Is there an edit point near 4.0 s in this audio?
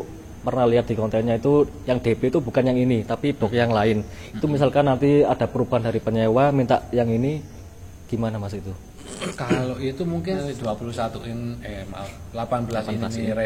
no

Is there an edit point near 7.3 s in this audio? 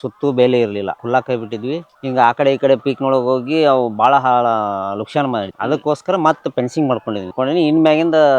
yes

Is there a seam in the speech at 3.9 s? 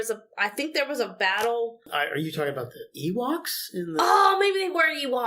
no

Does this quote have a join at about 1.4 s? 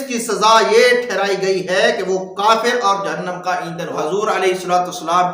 no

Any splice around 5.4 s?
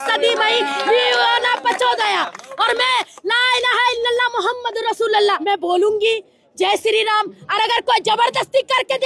yes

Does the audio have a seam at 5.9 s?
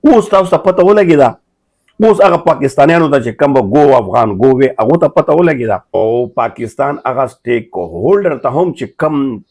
yes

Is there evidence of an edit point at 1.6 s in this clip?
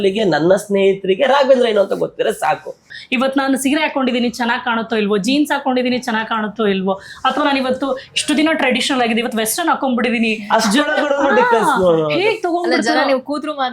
no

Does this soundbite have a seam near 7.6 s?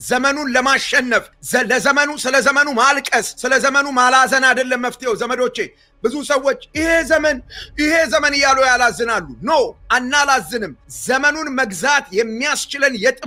no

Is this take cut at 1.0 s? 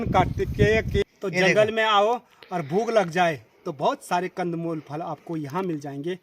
yes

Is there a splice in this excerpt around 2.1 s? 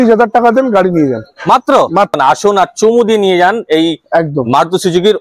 yes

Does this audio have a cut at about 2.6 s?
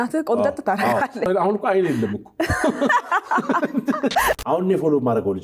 no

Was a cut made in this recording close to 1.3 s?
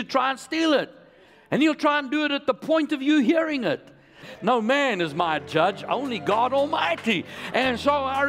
no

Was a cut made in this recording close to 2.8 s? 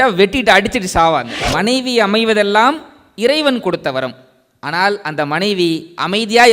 no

